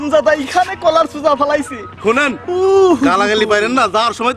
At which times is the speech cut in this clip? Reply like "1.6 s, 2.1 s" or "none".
none